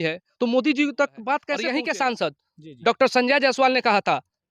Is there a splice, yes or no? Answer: yes